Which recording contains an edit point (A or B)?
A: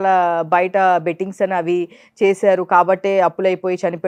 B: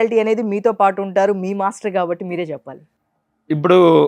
B